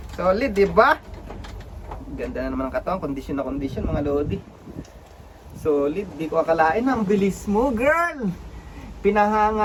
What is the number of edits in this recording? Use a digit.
0